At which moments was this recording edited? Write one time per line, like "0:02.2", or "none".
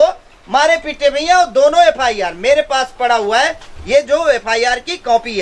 none

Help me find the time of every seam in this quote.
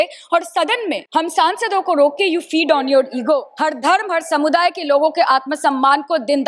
0:01.0
0:03.6

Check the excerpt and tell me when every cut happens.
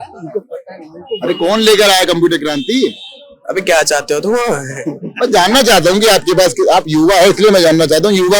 none

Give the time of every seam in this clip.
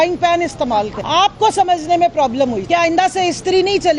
0:01.0
0:02.6

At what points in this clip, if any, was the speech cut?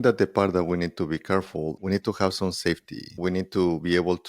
0:01.8
0:03.0

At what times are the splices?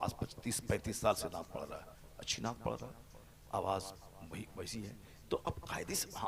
none

